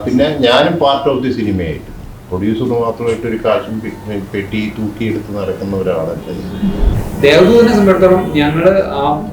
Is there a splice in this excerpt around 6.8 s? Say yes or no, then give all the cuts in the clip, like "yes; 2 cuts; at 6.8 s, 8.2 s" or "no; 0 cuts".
yes; 1 cut; at 6.8 s